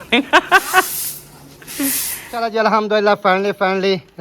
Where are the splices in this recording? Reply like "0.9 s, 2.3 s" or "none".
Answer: 2.2 s